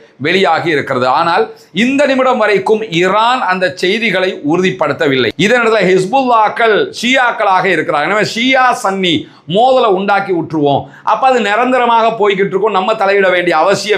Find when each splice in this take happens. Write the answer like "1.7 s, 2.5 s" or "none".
5.3 s